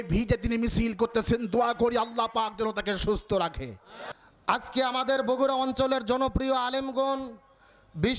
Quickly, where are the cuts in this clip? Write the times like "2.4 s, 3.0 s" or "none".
none

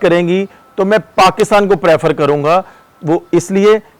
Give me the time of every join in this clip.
none

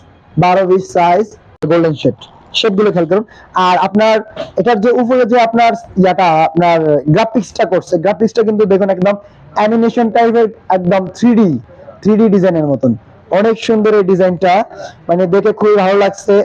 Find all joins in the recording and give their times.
1.6 s

